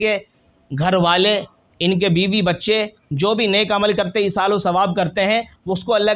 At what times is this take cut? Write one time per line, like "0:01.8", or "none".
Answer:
none